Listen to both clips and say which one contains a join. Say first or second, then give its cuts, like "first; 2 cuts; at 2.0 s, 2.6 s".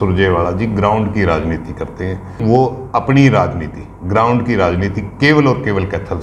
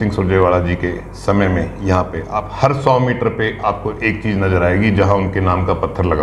first; 1 cut; at 2.4 s